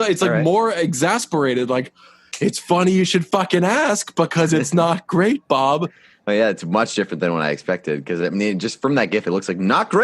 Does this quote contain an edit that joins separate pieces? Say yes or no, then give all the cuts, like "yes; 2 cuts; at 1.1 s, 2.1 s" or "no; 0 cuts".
yes; 1 cut; at 6.1 s